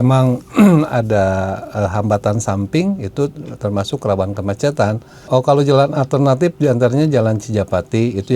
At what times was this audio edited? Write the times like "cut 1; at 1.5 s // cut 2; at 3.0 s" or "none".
cut 1; at 5.2 s